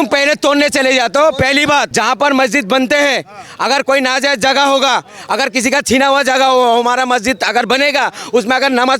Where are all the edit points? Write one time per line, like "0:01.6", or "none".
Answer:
0:01.9